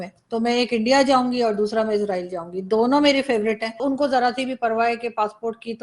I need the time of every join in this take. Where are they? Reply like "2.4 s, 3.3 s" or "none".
3.8 s